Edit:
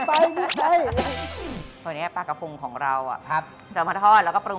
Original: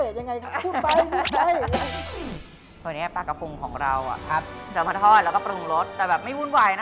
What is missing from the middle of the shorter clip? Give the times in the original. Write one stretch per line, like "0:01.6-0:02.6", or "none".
0:02.4-0:02.7

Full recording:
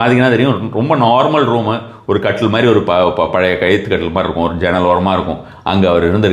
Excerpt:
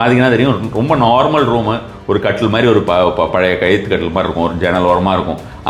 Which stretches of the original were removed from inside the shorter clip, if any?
none

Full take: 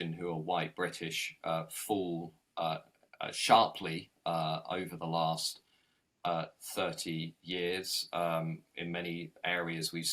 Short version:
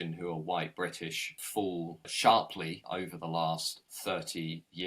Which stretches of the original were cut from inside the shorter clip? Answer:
0:01.5-0:02.7
0:04.1-0:04.6
0:05.7-0:06.6

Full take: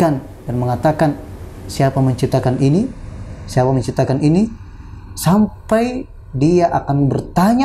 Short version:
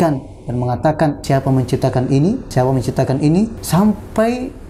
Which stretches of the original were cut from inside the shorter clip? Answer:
0:01.2-0:01.7
0:03.0-0:03.5
0:04.6-0:05.1

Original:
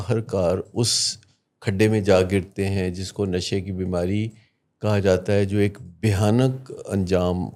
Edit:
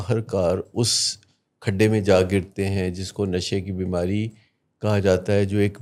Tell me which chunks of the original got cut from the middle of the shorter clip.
none

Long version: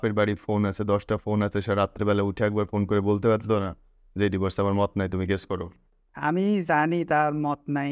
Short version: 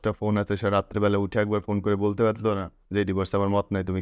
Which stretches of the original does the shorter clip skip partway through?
0:03.8-0:04.0

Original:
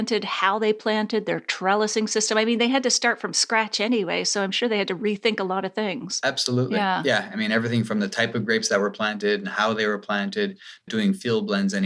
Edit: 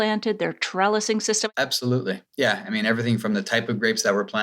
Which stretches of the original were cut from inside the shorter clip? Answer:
0:02.3-0:06.1

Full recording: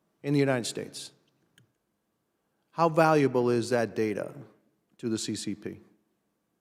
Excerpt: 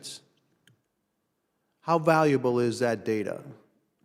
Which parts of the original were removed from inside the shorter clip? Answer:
none

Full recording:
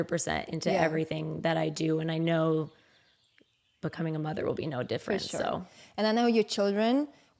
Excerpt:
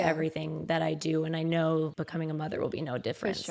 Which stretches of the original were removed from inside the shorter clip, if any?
0:02.7-0:03.8

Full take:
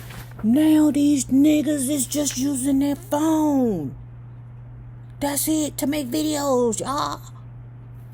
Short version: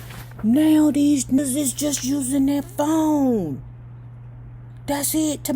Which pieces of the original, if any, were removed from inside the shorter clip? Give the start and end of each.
0:01.4-0:01.7

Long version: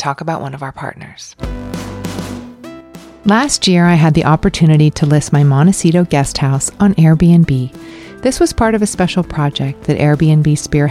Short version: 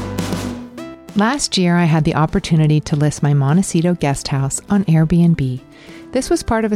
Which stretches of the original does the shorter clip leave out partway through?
0:02.9-0:03.1

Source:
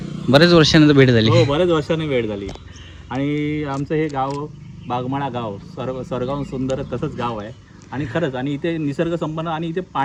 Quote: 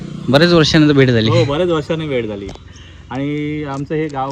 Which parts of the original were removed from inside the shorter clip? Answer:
none

